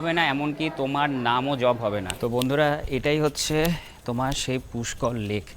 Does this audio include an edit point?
yes; 1 cut; at 2.0 s

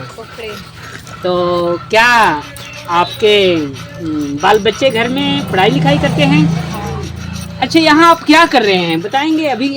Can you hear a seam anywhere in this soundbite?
no; 0 cuts

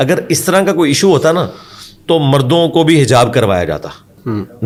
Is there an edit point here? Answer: no; 0 cuts

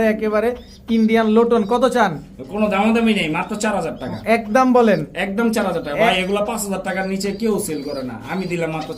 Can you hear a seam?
no; 0 cuts

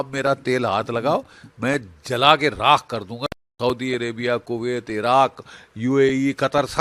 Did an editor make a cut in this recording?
no; 0 cuts

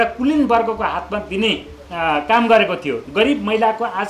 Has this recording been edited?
yes; 1 cut; at 3.0 s

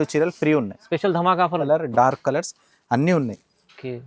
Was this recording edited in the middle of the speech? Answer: yes; 1 cut; at 1.6 s

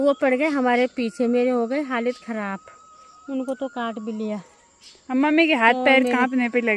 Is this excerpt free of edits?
yes; 0 cuts

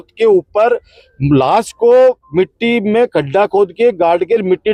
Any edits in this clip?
no; 0 cuts

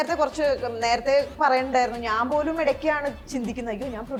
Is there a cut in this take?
no; 0 cuts

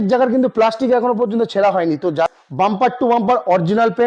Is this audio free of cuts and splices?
no; 1 cut; at 2.3 s

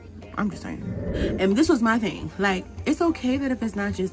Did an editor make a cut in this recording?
yes; 1 cut; at 1.2 s

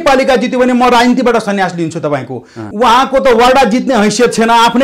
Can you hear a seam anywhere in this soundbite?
yes; 1 cut; at 2.6 s

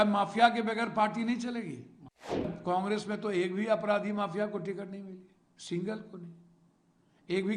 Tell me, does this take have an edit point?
yes; 1 cut; at 2.5 s

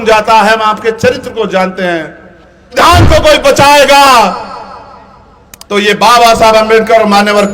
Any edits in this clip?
yes; 1 cut; at 2.7 s

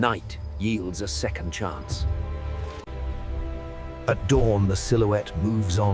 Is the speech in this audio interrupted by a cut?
no; 0 cuts

